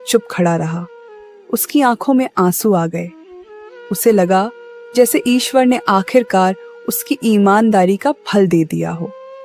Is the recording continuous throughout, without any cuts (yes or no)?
yes